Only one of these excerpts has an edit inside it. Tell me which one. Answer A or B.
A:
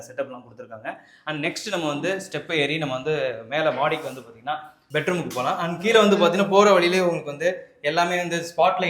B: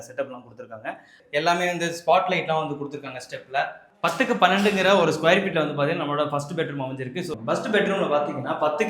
B